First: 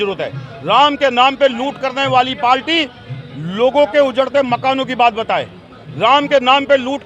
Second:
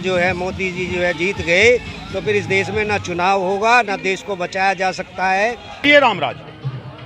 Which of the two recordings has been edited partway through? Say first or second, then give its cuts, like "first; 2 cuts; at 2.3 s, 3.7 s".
second; 1 cut; at 5.8 s